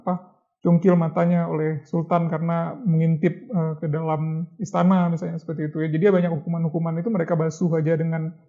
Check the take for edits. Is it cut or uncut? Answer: uncut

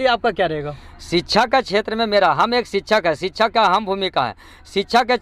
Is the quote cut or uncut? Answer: uncut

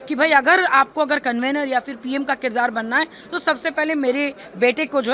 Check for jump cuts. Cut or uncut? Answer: uncut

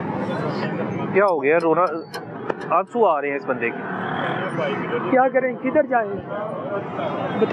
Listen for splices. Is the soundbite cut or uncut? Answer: uncut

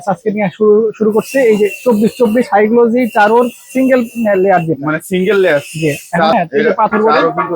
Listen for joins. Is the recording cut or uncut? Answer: cut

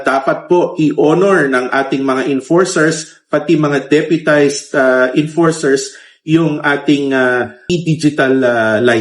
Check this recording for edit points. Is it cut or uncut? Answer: cut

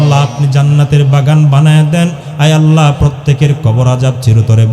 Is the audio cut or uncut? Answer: uncut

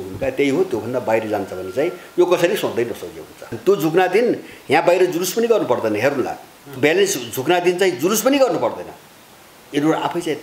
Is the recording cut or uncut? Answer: cut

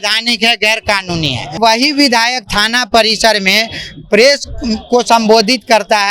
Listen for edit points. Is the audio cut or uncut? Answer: cut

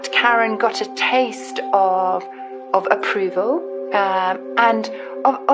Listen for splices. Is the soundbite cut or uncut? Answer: uncut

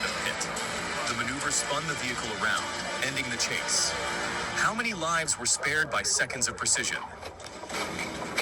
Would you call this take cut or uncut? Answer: uncut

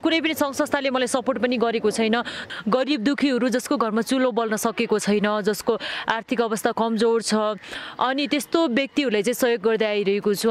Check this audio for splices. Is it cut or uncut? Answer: cut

